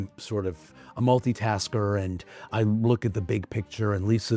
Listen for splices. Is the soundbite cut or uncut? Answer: uncut